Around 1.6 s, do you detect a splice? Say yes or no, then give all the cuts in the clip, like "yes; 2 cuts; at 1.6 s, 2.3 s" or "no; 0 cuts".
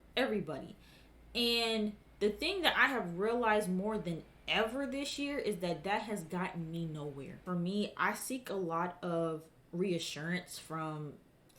no; 1 cut; at 7.4 s